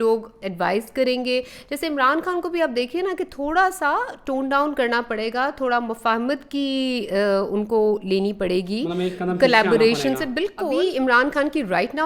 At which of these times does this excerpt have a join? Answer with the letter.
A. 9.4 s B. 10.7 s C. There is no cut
B